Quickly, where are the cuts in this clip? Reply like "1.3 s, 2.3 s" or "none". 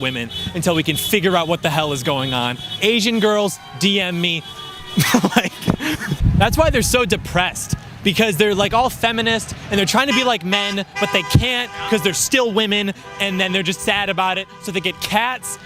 none

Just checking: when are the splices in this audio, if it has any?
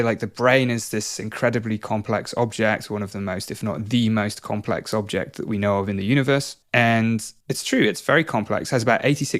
6.6 s, 7.3 s

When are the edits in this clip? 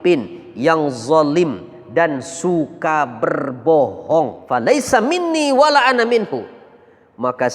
4.4 s

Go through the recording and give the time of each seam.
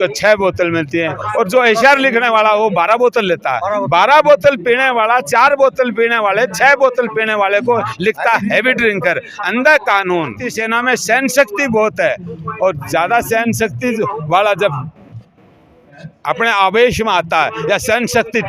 10.5 s

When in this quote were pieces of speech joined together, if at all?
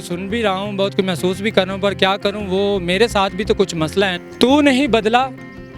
4.2 s

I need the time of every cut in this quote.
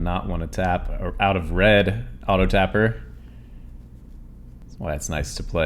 4.6 s

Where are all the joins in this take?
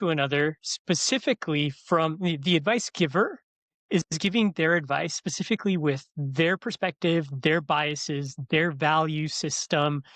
none

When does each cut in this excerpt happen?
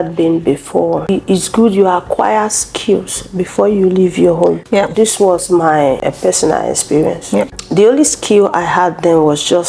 1.1 s, 4.6 s, 6.0 s, 7.6 s

